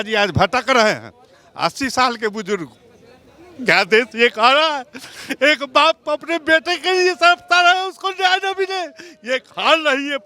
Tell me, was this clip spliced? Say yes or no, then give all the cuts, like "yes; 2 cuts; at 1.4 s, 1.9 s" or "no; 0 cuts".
no; 0 cuts